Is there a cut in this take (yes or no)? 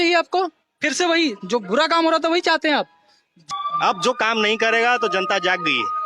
yes